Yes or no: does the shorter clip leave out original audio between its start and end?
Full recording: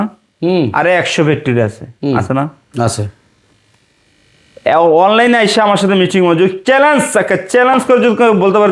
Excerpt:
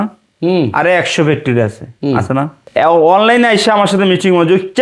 yes